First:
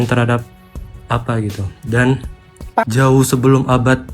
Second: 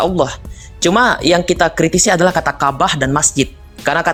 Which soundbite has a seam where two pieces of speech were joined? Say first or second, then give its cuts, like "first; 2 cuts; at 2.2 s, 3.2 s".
first; 1 cut; at 2.8 s